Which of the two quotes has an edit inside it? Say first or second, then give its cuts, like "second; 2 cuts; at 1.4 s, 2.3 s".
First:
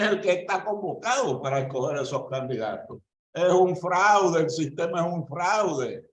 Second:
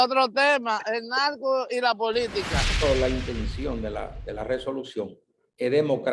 second; 1 cut; at 2.7 s